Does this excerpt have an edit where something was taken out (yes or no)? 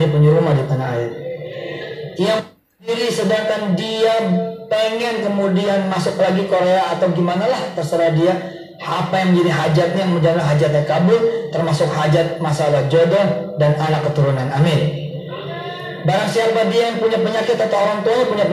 yes